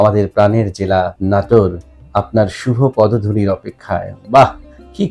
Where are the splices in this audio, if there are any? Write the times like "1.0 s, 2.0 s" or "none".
1.2 s